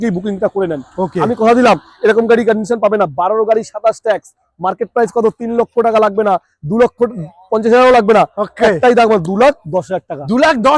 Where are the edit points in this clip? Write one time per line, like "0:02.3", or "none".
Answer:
none